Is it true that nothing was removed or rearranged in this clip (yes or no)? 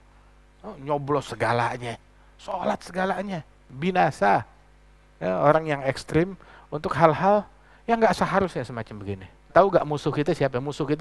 no